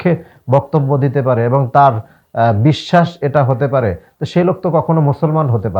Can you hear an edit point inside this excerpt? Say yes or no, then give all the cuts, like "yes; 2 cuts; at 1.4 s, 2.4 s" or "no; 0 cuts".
no; 0 cuts